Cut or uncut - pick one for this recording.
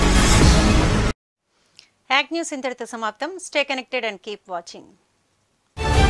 uncut